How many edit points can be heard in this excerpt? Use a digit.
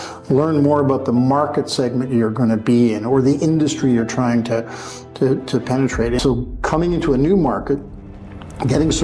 1